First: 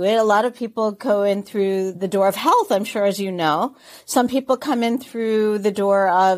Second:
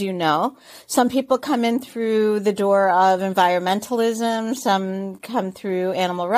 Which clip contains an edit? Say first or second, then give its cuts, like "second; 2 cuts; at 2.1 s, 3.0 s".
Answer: first; 1 cut; at 2.0 s